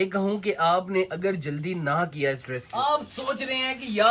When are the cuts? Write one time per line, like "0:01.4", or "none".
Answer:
0:02.6